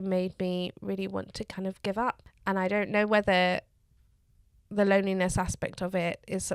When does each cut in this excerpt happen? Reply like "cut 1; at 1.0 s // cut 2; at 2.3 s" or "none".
cut 1; at 2.3 s